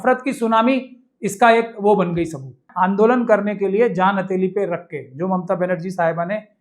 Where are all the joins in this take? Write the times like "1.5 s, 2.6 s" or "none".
2.7 s